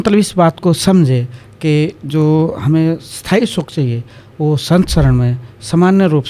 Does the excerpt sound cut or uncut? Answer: uncut